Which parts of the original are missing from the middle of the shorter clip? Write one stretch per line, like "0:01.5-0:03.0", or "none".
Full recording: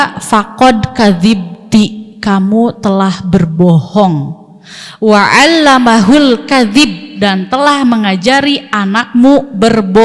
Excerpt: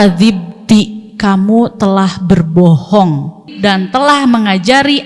0:04.5-0:07.0